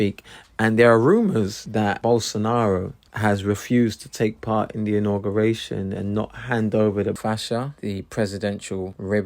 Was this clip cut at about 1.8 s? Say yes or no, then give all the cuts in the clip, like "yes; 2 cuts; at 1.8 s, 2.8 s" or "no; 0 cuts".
yes; 1 cut; at 1.8 s